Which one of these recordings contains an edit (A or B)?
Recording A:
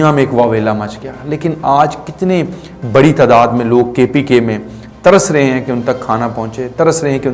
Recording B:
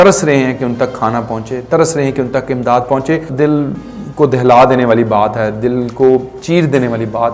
B